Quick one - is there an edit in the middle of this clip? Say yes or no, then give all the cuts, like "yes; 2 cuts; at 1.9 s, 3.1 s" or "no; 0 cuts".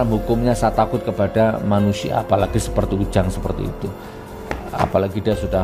no; 0 cuts